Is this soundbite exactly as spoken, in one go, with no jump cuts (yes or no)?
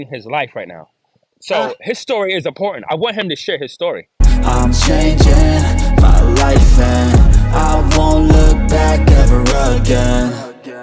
no